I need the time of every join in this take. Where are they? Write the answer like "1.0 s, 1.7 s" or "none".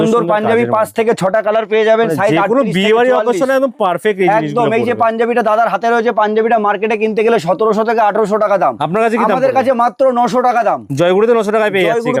none